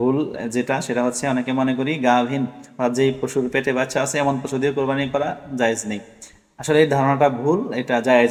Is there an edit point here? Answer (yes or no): no